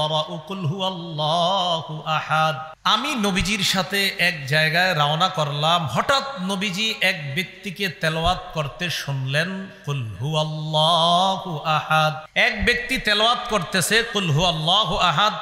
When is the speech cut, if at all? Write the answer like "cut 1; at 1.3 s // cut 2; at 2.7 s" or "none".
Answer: cut 1; at 2.7 s // cut 2; at 12.2 s